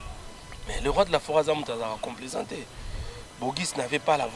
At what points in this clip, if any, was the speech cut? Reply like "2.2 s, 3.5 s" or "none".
none